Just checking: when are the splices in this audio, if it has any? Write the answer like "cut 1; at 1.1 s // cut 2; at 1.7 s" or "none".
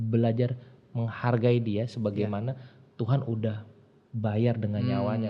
none